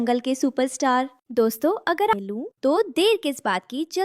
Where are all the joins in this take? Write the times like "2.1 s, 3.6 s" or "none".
2.1 s